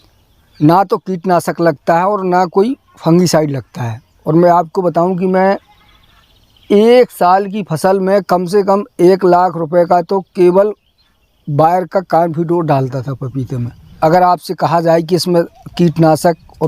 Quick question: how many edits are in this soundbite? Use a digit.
1